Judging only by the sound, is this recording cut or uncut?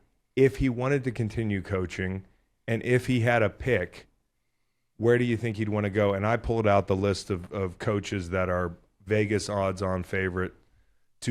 uncut